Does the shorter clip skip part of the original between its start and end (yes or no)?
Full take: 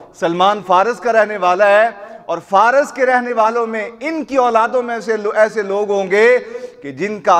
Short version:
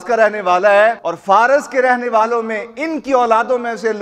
yes